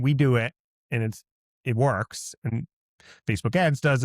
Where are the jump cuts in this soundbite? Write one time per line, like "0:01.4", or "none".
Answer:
0:02.5